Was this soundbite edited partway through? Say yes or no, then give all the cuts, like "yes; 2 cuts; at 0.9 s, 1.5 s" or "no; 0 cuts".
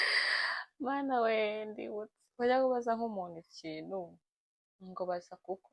no; 0 cuts